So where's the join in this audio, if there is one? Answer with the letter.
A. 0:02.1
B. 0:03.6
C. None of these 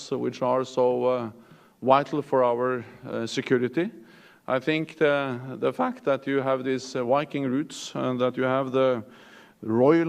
A